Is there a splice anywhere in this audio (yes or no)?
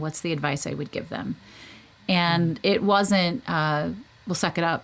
no